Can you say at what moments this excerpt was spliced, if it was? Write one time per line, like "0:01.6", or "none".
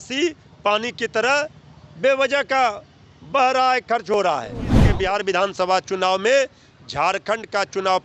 0:05.0